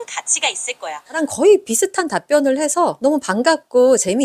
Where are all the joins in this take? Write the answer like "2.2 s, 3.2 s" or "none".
1.2 s